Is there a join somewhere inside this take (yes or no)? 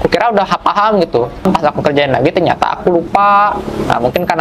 yes